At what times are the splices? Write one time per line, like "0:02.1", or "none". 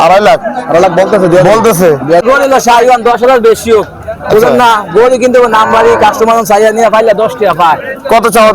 0:02.2